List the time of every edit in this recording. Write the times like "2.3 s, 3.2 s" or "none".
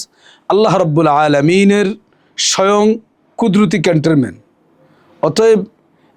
none